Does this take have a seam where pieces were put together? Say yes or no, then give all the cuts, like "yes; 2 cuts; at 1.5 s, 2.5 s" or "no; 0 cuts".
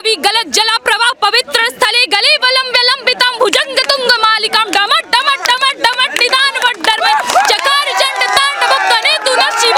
no; 0 cuts